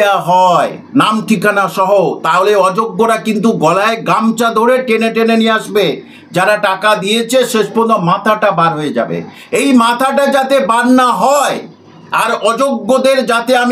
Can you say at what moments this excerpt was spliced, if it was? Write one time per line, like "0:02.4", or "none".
none

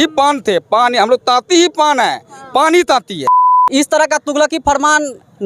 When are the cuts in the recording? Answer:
0:03.5

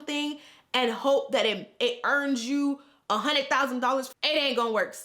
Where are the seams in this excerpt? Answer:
0:04.1

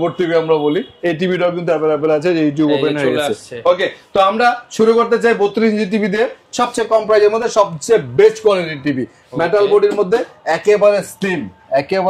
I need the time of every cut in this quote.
none

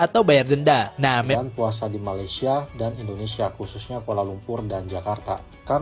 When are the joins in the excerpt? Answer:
0:01.3

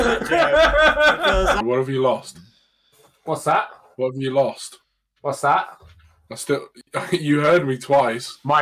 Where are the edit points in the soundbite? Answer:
0:01.6

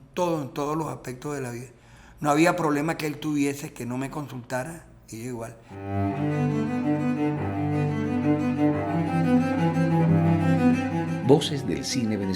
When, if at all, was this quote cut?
0:05.6

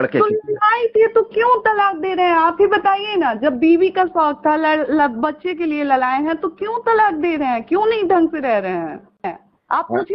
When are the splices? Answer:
0:09.2

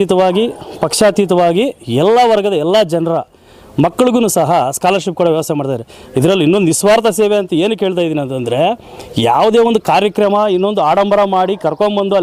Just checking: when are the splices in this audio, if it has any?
none

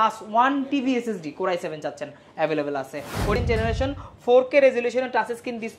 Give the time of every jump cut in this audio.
0:03.4

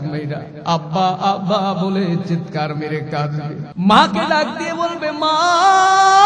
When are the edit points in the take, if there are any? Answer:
0:03.6

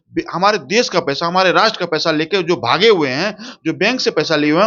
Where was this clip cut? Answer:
none

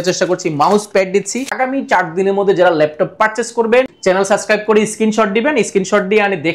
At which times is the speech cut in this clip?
0:01.5
0:03.9

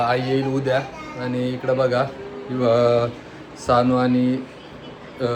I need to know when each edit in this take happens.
none

